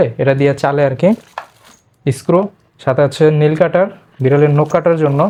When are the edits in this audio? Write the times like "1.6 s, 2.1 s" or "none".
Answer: none